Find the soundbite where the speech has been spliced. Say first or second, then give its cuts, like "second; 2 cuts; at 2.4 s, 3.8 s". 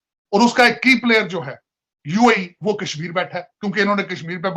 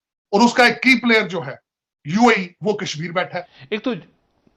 second; 1 cut; at 3.4 s